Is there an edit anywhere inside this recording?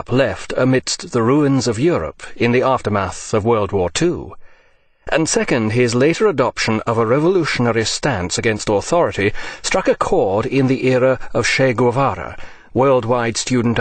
no; 0 cuts

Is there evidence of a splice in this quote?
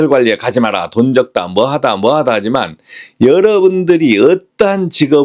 no; 0 cuts

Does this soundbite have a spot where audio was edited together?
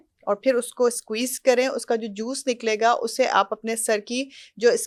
no; 0 cuts

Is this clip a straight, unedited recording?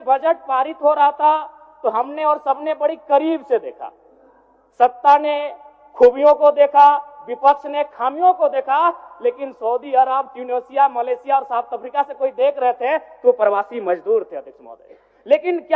yes; 0 cuts

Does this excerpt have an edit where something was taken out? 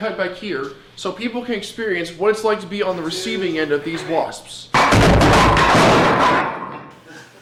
no; 0 cuts

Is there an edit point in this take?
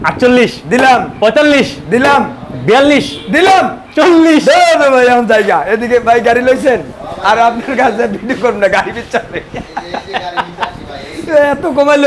no; 0 cuts

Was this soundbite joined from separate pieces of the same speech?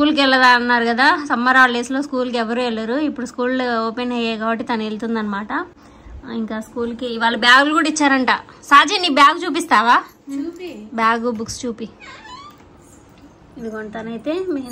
no; 0 cuts

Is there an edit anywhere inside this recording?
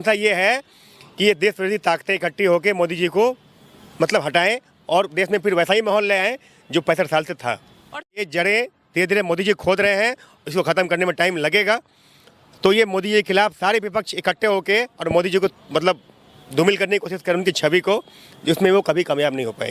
yes; 1 cut; at 8.0 s

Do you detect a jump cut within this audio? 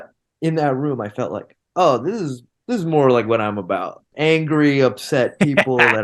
yes; 1 cut; at 4.1 s

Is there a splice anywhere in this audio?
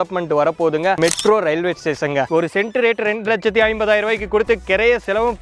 yes; 2 cuts; at 1.0 s, 2.3 s

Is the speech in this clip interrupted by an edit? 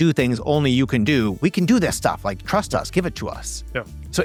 no; 0 cuts

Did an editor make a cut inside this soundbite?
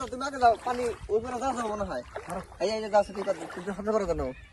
no; 0 cuts

